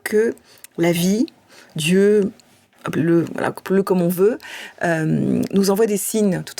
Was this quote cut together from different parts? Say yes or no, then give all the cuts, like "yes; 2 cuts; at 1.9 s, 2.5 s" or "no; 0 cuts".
no; 0 cuts